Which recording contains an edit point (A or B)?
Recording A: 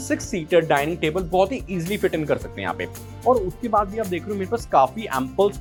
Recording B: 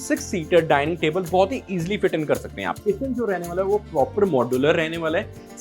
B